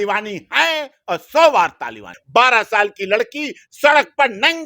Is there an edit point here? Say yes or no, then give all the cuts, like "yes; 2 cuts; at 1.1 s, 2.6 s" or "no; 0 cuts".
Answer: yes; 1 cut; at 2.2 s